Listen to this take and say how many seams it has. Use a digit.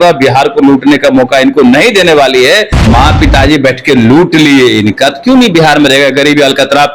1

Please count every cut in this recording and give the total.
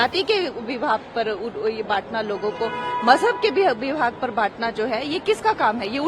0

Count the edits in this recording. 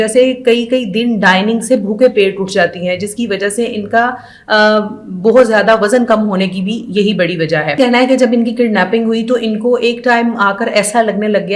1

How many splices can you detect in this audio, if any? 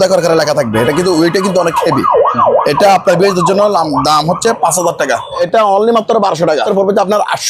2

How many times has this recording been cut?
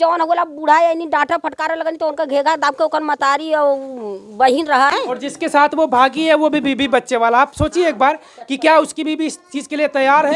1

